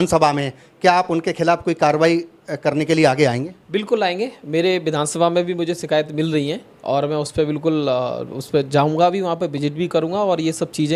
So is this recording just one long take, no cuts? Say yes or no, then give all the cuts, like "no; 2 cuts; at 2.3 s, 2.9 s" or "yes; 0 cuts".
yes; 0 cuts